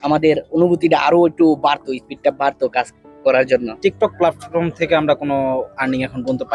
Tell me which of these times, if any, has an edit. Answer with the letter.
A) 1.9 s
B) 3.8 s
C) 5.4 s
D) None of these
B